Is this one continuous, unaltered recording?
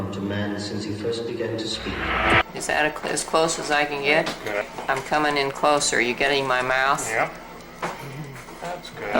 no; 2 cuts; at 2.4 s, 4.7 s

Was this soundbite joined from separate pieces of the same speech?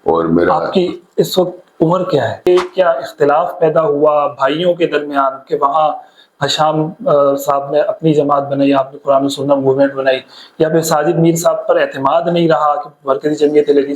yes; 1 cut; at 2.5 s

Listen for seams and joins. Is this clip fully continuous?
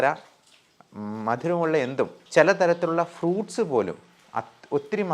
no; 1 cut; at 2.2 s

